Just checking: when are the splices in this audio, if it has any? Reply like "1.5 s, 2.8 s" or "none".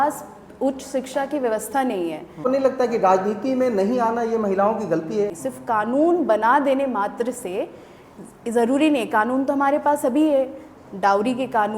2.4 s, 5.4 s